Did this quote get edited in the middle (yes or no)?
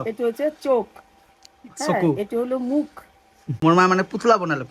yes